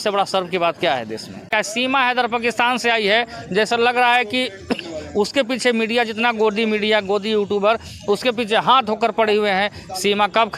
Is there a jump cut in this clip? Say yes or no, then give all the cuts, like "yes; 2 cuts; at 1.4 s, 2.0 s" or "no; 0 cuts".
yes; 1 cut; at 1.5 s